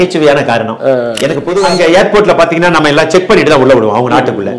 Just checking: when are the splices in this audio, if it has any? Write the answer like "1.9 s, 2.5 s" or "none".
1.6 s